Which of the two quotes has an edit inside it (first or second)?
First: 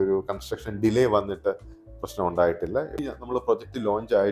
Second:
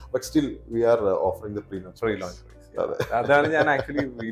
first